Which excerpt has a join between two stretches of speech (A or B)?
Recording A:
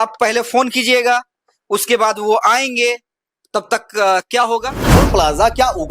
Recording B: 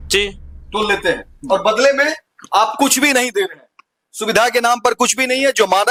A